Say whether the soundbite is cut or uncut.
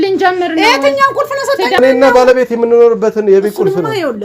cut